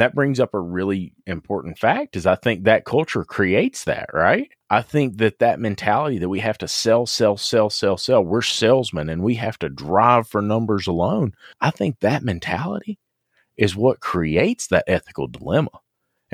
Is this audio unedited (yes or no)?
no